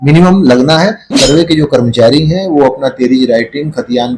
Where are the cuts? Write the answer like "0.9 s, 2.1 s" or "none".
1.1 s